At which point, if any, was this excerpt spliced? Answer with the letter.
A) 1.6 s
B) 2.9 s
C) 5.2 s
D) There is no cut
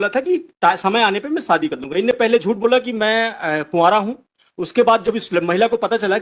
D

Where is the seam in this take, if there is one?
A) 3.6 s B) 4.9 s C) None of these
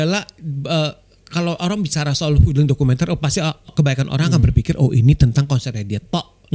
A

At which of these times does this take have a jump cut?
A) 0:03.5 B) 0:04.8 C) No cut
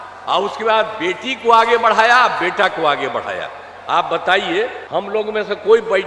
B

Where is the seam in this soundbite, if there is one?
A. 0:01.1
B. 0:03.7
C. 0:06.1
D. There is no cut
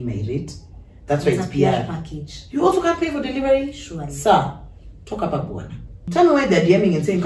C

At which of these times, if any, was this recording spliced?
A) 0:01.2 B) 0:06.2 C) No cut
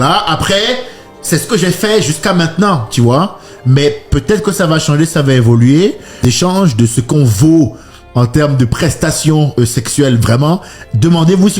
B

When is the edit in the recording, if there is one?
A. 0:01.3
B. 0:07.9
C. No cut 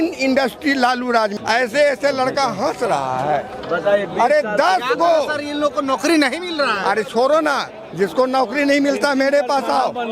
A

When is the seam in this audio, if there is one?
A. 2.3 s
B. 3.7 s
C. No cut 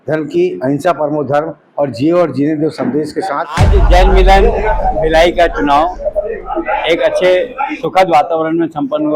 B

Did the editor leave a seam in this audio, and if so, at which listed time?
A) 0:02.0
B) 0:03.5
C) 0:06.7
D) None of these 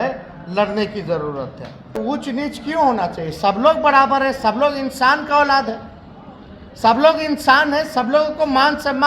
A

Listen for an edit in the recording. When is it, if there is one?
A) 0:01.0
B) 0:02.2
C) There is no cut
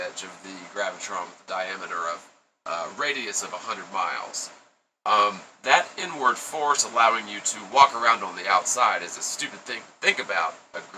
B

